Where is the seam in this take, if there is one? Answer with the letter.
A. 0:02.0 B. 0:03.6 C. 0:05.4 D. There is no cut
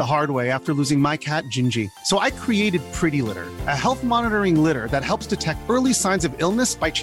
D